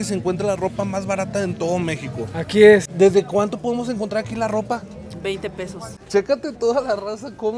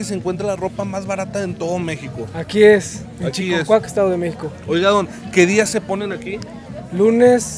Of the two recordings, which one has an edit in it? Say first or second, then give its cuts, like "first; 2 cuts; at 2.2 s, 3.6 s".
first; 2 cuts; at 2.9 s, 6.0 s